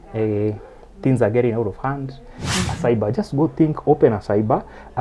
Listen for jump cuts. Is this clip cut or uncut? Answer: cut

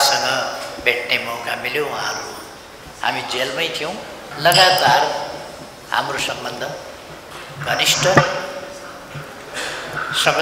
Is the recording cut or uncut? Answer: cut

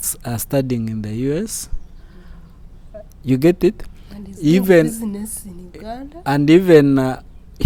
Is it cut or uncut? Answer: uncut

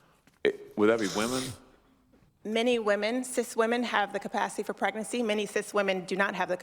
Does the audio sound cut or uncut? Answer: cut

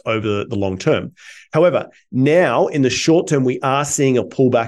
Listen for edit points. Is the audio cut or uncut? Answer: uncut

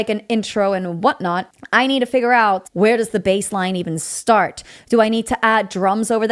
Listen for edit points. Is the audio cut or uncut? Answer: cut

